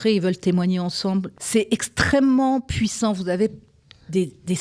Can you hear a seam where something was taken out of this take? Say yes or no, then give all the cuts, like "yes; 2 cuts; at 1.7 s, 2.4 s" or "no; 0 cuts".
yes; 1 cut; at 1.3 s